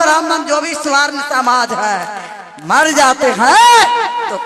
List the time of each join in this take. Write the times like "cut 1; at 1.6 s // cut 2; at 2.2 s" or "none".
none